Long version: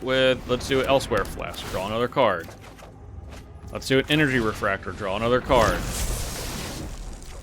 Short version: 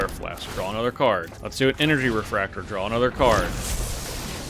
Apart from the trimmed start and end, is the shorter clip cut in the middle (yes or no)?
yes